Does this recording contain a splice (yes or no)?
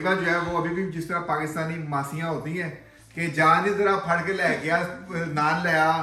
no